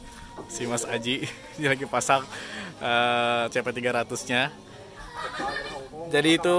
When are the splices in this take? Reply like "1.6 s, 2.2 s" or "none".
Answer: 5.1 s